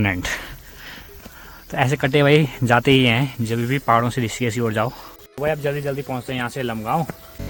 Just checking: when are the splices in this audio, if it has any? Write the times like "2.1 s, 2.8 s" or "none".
none